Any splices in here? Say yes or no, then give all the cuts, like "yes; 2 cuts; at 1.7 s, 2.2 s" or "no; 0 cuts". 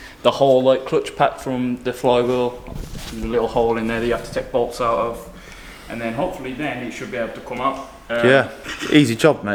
no; 0 cuts